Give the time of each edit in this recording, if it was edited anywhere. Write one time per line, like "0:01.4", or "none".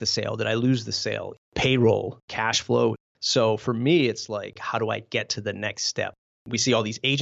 0:01.4
0:02.2
0:03.1
0:04.6
0:06.5